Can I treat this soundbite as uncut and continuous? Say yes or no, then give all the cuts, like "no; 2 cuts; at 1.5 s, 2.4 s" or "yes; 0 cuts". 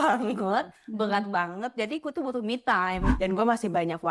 no; 1 cut; at 3.1 s